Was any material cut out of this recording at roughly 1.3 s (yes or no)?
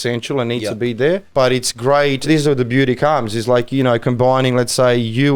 yes